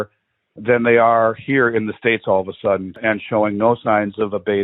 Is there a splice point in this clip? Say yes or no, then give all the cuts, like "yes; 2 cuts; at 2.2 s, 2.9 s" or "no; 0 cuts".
yes; 1 cut; at 3.0 s